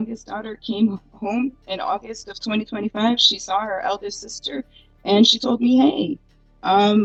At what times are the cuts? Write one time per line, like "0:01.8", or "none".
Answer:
none